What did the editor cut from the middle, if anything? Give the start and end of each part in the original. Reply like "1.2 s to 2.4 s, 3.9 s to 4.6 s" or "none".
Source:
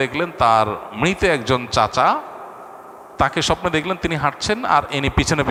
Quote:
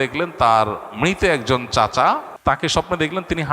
2.3 s to 3.0 s